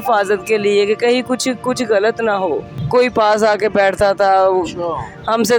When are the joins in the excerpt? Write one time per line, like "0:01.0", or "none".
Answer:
0:02.7